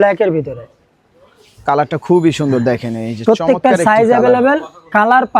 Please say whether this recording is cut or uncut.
uncut